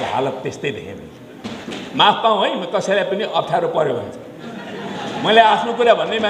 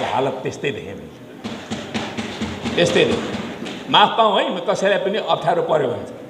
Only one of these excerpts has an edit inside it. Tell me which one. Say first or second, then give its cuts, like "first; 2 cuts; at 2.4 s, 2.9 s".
first; 1 cut; at 1.6 s